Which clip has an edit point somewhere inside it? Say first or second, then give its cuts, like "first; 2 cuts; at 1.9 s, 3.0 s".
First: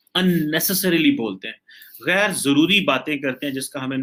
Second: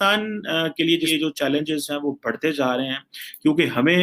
second; 1 cut; at 1.1 s